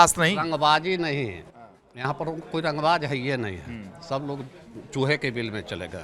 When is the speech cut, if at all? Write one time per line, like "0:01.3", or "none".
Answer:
none